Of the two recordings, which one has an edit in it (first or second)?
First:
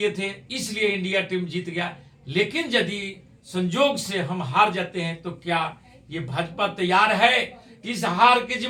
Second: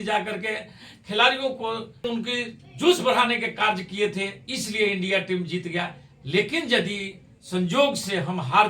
second